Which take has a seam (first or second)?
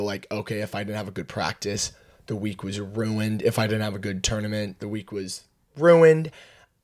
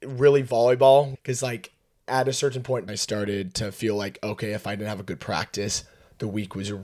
second